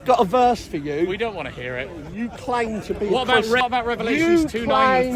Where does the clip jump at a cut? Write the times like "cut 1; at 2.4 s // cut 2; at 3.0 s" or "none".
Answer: cut 1; at 2.0 s // cut 2; at 3.6 s